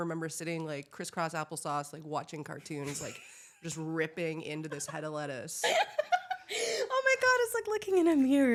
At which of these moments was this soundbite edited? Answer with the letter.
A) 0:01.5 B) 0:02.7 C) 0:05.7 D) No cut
D